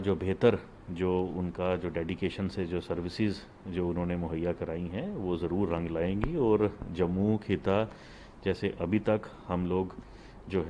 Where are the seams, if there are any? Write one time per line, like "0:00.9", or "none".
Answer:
none